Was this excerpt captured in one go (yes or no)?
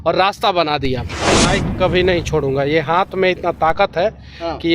no